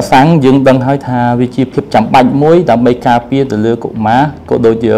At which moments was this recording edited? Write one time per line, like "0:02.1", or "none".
none